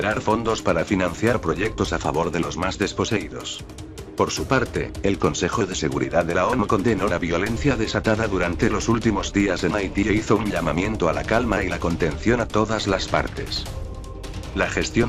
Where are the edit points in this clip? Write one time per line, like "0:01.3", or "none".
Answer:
none